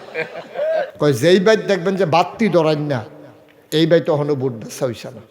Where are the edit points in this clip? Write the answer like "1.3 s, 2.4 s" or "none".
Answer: 0.9 s